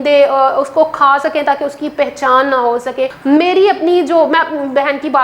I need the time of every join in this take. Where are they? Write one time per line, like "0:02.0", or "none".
0:03.2